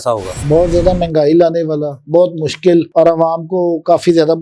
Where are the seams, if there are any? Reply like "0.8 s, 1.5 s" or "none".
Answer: none